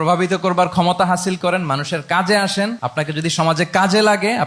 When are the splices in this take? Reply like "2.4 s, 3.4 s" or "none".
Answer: 2.8 s